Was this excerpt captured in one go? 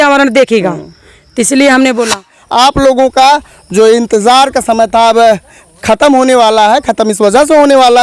no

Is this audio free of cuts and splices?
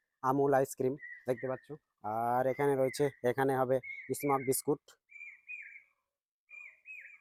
yes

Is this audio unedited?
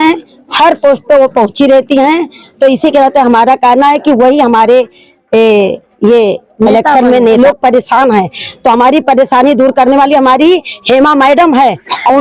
no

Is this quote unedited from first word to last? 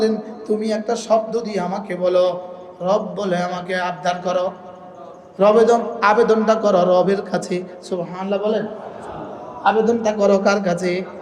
yes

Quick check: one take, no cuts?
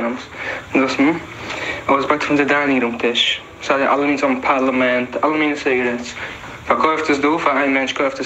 no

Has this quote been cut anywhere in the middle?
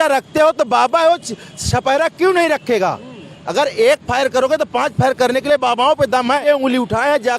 yes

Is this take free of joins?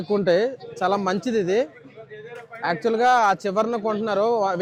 yes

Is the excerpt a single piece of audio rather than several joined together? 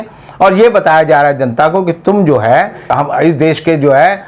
no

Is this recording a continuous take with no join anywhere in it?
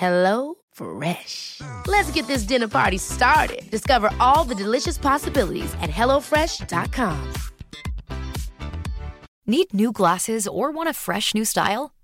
no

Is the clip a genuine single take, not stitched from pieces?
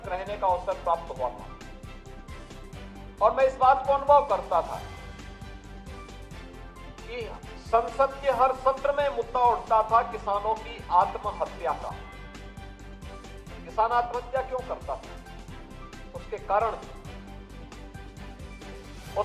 no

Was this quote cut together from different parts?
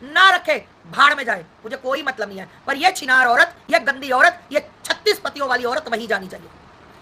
no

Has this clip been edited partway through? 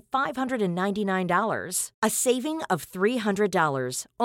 no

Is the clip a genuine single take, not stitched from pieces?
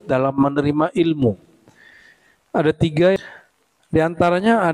no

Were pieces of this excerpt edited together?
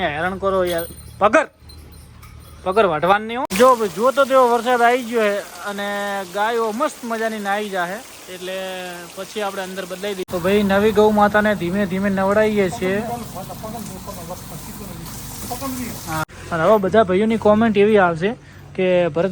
yes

